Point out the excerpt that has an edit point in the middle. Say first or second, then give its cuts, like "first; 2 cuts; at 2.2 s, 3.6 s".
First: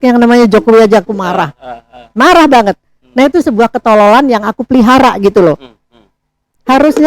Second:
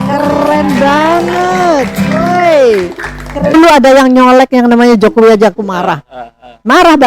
second; 1 cut; at 3.5 s